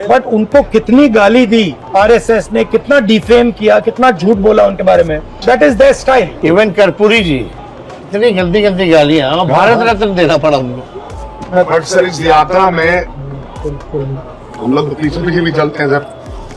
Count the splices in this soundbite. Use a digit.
0